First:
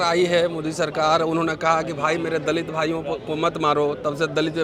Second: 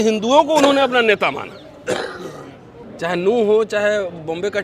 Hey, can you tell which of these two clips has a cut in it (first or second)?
second